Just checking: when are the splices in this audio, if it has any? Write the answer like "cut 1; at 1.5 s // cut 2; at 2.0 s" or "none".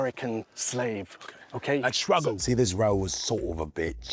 cut 1; at 2.4 s